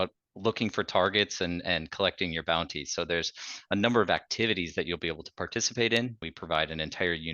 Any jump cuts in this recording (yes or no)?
yes